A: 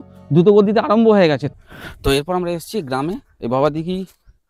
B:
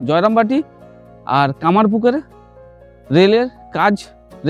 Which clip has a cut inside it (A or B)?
A